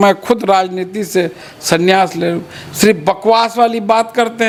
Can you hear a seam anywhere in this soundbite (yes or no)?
no